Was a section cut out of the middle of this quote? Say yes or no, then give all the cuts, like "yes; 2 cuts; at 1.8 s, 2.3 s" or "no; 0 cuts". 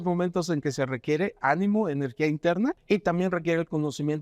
yes; 1 cut; at 2.8 s